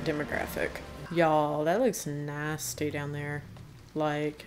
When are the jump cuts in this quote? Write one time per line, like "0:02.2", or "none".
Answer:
0:01.0